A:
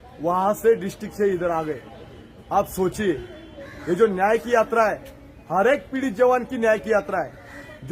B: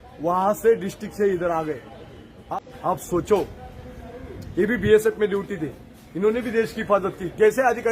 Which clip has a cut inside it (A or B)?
B